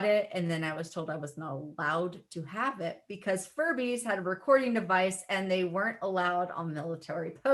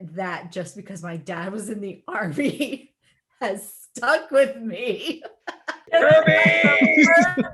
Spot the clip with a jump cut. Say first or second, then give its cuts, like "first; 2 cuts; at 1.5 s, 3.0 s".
second; 1 cut; at 5.8 s